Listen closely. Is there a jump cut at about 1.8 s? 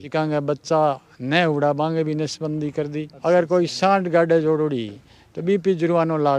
no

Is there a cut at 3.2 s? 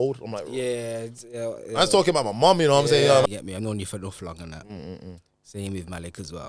yes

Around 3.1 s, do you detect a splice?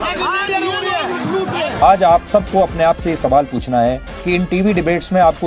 no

